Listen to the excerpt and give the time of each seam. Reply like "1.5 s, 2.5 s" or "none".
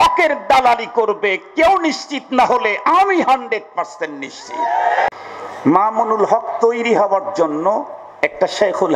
5.1 s